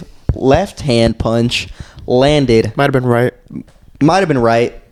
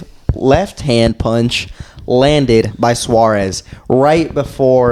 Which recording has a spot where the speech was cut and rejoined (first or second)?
second